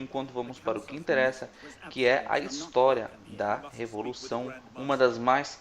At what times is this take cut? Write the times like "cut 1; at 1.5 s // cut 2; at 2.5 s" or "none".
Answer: cut 1; at 3.7 s